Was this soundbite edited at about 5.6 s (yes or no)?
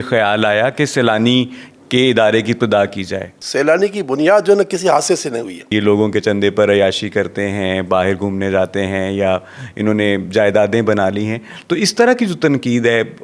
yes